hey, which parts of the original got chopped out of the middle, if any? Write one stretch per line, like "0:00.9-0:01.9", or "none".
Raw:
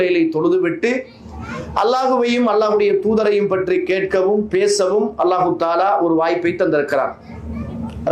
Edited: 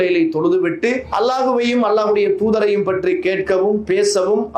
0:01.1-0:01.7